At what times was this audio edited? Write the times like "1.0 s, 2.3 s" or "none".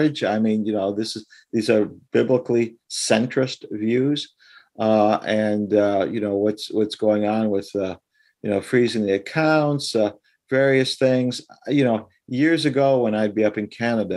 none